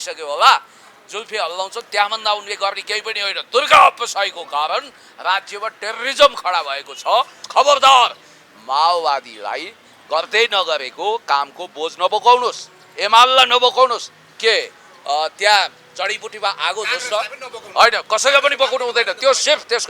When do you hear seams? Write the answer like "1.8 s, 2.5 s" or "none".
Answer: 7.4 s